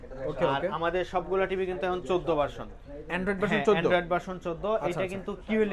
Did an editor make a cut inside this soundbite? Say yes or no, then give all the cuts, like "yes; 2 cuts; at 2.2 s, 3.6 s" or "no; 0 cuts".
no; 0 cuts